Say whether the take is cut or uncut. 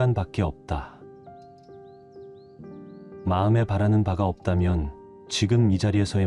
uncut